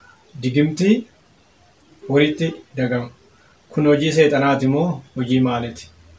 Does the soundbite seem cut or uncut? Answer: uncut